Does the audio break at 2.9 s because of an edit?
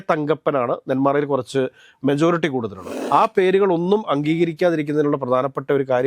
yes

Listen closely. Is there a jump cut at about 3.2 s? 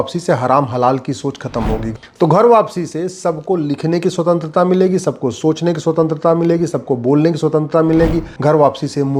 no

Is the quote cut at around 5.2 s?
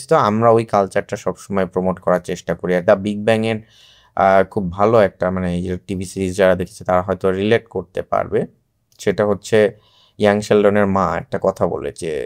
no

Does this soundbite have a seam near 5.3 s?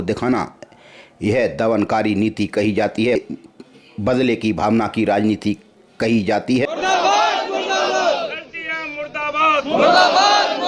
no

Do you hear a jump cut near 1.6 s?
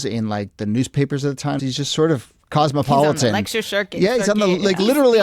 yes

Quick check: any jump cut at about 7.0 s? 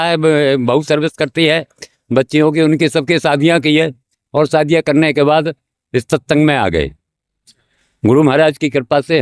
no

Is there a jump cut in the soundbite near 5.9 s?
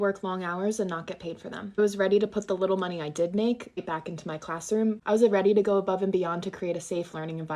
no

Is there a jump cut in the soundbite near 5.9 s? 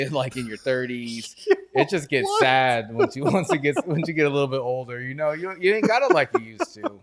no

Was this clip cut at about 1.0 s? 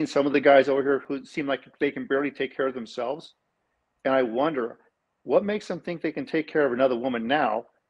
yes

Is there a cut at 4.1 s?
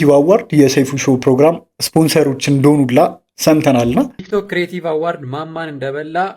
yes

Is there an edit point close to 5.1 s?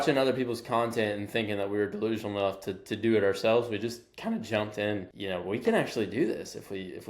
yes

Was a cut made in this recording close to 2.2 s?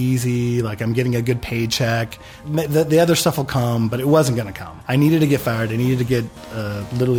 no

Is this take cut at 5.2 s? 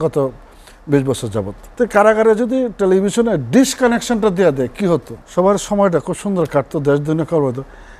yes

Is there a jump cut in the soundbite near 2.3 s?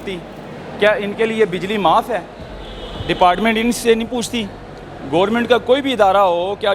no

